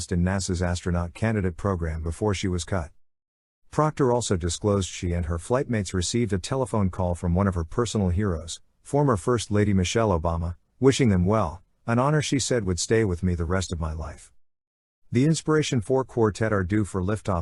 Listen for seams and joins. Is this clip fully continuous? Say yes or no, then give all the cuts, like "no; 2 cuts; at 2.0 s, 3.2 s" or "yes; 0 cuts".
yes; 0 cuts